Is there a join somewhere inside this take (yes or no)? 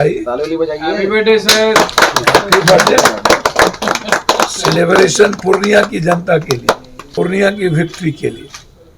yes